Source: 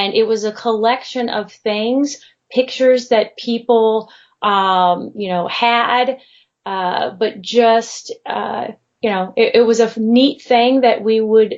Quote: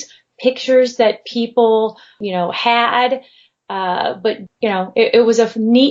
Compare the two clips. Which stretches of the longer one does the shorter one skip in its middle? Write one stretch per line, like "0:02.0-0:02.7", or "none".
0:04.3-0:05.1
0:07.4-0:08.9